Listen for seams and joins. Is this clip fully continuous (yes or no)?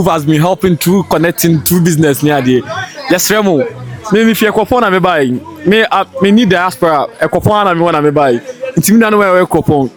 yes